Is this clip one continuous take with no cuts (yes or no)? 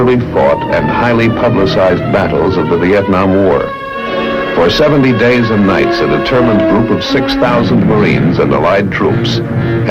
no